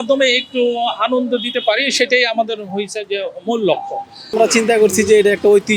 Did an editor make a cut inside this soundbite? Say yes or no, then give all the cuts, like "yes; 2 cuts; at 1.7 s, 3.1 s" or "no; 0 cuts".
yes; 1 cut; at 4.3 s